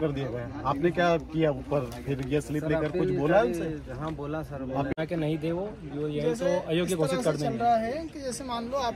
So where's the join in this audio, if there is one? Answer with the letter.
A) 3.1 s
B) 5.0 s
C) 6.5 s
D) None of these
B